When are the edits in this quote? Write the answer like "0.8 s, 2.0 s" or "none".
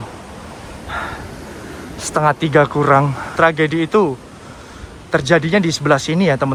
none